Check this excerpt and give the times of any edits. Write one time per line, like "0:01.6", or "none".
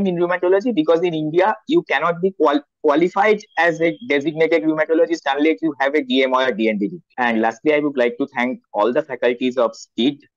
0:07.0